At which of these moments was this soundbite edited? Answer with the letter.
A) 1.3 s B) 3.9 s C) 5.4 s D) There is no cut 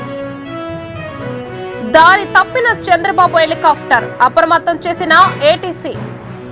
A